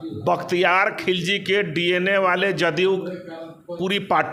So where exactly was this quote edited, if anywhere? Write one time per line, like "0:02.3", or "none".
none